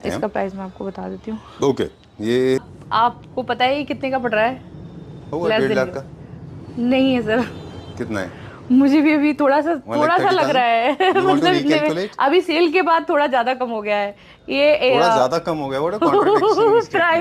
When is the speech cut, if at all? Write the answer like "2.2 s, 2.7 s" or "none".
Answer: 2.6 s